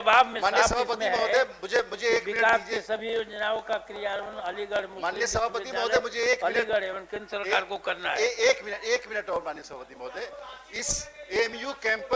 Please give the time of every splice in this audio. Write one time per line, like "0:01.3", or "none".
none